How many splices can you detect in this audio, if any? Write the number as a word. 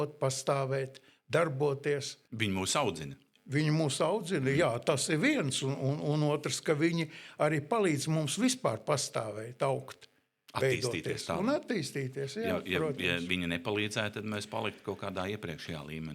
zero